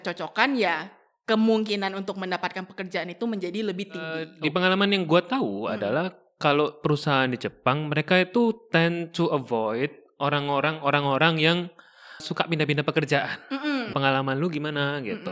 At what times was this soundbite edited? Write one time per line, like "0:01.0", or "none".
0:04.3
0:12.2
0:13.9